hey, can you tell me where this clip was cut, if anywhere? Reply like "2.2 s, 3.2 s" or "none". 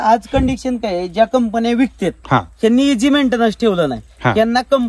none